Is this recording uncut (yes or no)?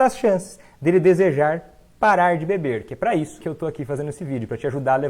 no